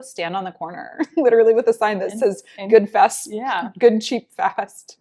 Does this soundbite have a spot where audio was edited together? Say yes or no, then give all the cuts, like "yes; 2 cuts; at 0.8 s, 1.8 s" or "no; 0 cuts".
no; 0 cuts